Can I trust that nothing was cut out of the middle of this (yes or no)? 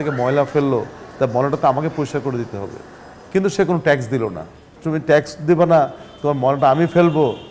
yes